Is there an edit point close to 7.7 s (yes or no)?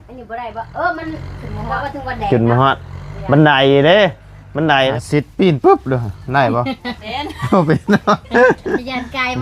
no